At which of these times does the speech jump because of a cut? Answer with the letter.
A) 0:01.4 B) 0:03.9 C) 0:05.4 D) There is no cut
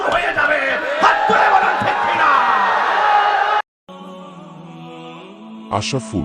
B